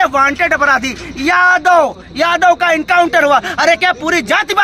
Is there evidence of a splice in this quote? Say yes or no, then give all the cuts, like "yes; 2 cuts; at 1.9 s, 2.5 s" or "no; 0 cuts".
no; 0 cuts